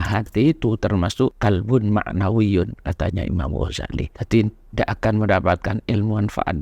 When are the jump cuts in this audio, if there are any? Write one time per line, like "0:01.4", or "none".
0:01.4
0:04.2

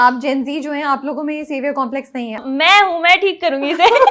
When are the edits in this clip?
0:02.4

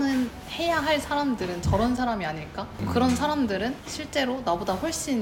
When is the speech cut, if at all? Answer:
none

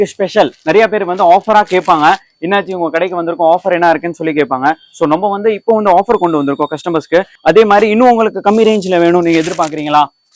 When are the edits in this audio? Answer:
0:07.3

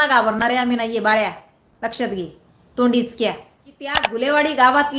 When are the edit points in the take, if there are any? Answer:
0:04.1

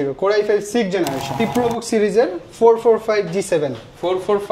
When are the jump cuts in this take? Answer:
0:01.4

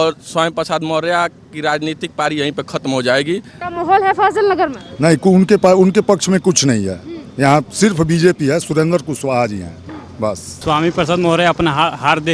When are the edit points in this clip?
0:03.6
0:10.5

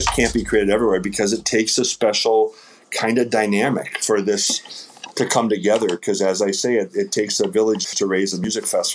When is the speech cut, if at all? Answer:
none

